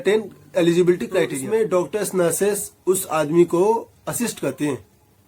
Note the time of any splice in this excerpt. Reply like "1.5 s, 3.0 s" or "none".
1.4 s